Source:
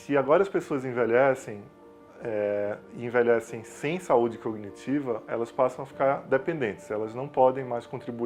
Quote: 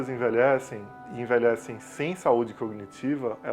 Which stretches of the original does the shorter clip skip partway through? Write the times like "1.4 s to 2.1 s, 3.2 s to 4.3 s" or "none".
1.8 s to 2.9 s